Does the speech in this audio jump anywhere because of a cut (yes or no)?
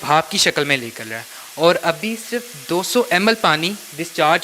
no